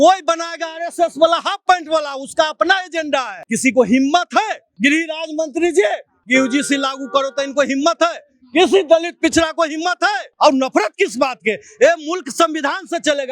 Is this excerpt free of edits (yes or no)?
no